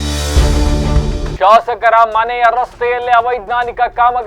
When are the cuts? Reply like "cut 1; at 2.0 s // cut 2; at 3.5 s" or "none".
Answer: cut 1; at 1.3 s